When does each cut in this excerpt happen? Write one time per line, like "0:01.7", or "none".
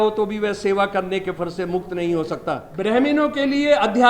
0:02.7